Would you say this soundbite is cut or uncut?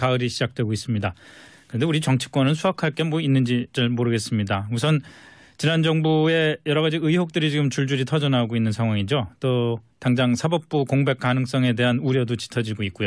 uncut